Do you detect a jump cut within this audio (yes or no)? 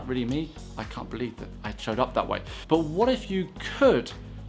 yes